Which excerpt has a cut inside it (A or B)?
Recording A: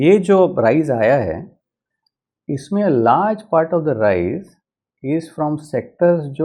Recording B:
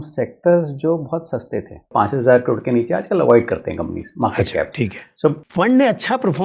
B